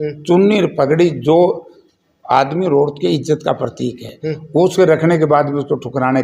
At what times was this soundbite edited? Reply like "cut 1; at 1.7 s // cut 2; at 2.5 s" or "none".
none